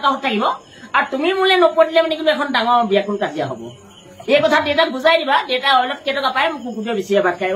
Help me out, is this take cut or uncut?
uncut